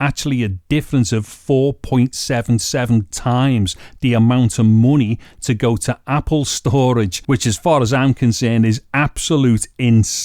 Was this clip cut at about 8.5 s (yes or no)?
no